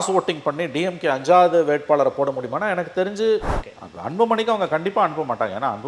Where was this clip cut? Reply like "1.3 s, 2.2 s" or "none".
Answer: 3.5 s